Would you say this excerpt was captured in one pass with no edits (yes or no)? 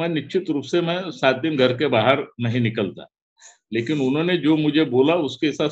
yes